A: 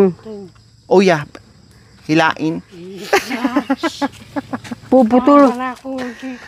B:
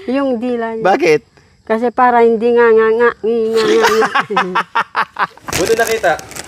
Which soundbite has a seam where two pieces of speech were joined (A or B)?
B